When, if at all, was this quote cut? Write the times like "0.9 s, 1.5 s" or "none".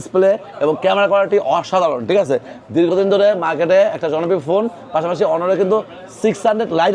none